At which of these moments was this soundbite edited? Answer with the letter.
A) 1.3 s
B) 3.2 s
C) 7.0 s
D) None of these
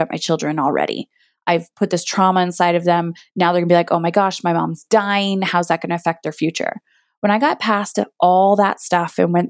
A